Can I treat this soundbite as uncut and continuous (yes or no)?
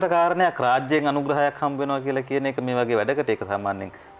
yes